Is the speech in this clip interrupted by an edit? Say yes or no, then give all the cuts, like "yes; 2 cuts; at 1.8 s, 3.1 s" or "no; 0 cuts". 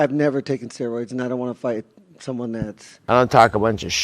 yes; 1 cut; at 2.9 s